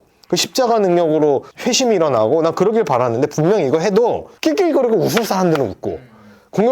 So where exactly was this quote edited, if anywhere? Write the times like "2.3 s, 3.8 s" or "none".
none